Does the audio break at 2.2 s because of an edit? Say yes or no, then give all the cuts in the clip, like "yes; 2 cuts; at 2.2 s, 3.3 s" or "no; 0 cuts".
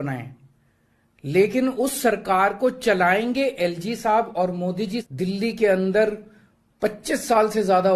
no; 1 cut; at 5.1 s